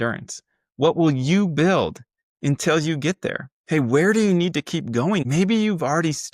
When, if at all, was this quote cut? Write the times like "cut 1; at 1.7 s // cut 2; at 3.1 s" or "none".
cut 1; at 3.5 s // cut 2; at 5.2 s